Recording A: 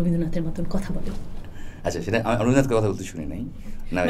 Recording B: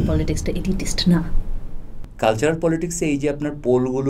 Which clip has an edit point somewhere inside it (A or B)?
B